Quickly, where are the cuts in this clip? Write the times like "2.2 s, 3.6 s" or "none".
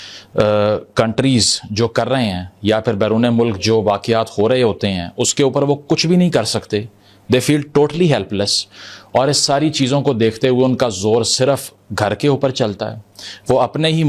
none